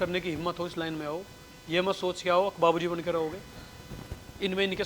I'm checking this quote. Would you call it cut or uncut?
uncut